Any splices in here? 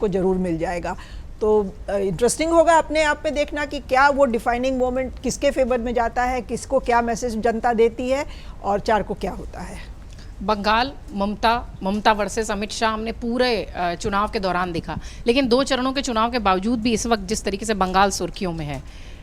no; 0 cuts

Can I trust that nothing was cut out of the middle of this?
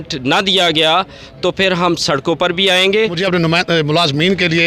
no; 1 cut; at 3.2 s

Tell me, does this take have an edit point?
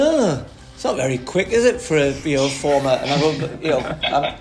no; 0 cuts

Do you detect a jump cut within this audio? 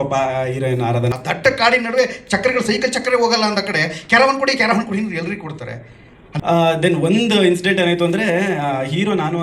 yes; 2 cuts; at 1.1 s, 6.3 s

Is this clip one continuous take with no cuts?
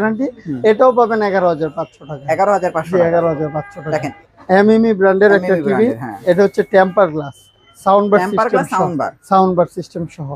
no; 1 cut; at 4.1 s

